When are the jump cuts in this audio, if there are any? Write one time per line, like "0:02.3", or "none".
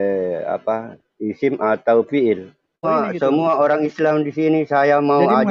0:02.9